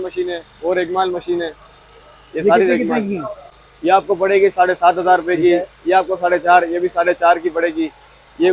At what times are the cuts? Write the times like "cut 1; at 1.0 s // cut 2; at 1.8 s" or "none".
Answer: none